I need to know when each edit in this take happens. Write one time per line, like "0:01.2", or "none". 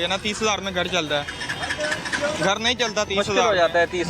none